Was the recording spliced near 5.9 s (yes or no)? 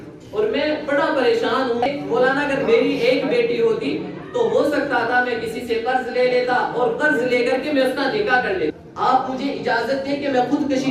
no